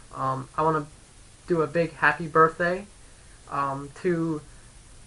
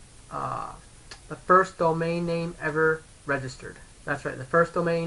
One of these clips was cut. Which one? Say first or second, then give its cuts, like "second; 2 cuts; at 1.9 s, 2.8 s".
first; 1 cut; at 3.2 s